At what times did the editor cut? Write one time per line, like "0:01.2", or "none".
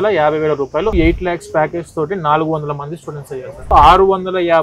0:00.9
0:03.7